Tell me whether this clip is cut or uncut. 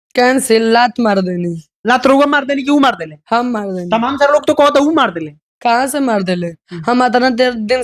uncut